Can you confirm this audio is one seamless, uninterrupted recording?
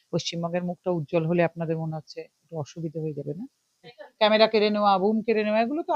no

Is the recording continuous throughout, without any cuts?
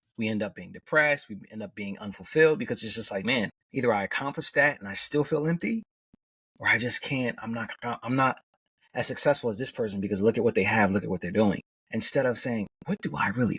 no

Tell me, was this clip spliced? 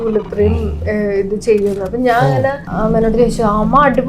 yes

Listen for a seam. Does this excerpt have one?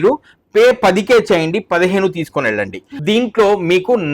yes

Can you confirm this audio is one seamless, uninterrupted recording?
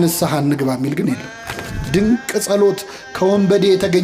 no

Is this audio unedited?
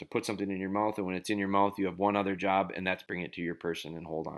no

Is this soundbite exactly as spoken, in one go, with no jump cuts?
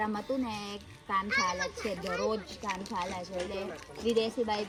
yes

